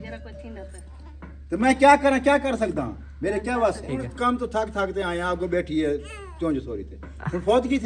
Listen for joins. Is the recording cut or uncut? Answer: cut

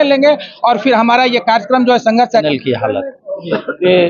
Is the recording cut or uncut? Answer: cut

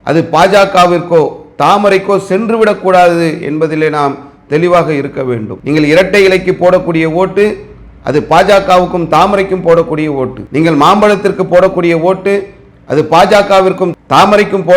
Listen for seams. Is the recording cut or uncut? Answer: cut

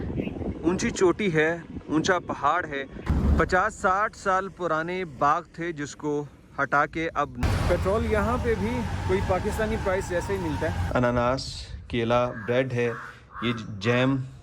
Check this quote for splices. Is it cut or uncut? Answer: cut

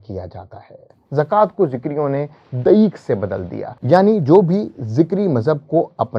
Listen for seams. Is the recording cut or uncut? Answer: uncut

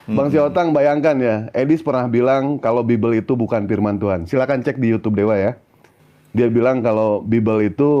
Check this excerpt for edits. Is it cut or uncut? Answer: uncut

